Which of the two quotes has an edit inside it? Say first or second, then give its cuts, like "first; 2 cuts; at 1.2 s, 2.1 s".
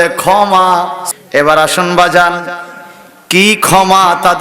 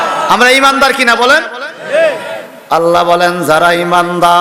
first; 1 cut; at 1.0 s